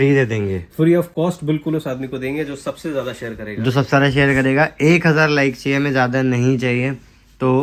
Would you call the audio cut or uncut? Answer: uncut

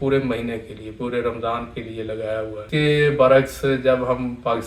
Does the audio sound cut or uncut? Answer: cut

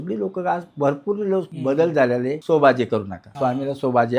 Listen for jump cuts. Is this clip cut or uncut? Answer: cut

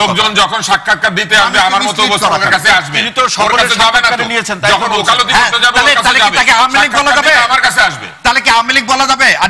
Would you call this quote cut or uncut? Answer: uncut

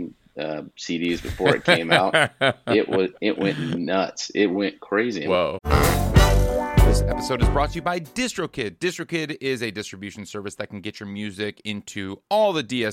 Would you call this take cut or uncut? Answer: cut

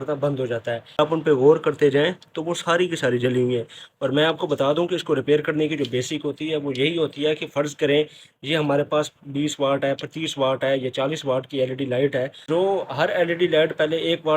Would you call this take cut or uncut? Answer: cut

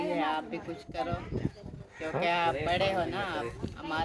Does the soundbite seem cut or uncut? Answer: uncut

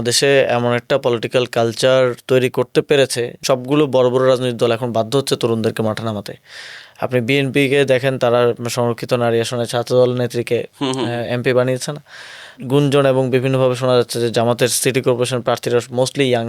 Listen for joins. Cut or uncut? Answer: cut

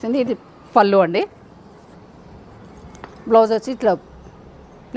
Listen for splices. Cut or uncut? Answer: uncut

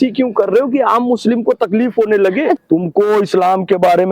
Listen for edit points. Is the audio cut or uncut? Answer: cut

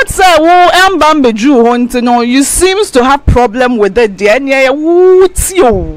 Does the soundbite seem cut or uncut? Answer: uncut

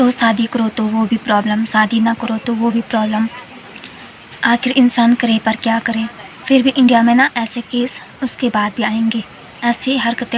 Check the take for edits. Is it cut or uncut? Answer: cut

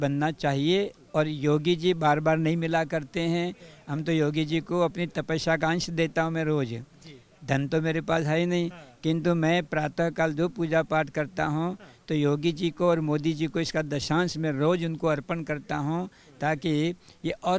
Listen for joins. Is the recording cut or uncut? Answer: uncut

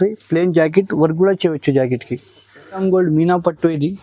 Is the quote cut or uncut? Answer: cut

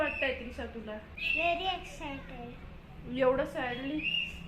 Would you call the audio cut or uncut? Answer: cut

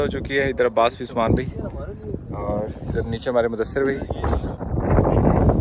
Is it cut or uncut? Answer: uncut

